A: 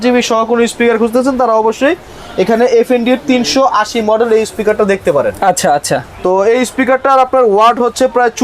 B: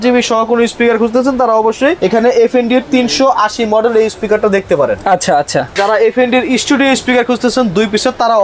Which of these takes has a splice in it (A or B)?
B